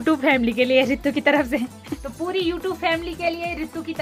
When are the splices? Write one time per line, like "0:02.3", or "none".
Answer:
none